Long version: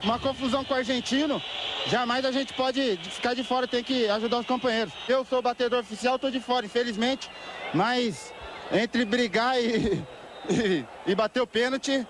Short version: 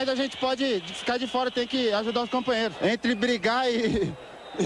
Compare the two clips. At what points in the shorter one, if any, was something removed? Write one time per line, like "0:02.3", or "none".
0:02.7